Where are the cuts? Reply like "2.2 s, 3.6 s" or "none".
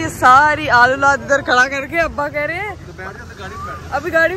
none